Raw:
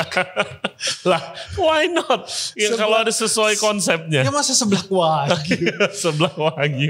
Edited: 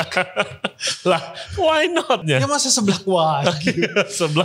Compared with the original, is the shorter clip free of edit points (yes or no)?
no